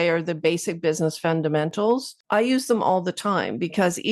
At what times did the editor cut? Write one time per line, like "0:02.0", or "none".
0:02.1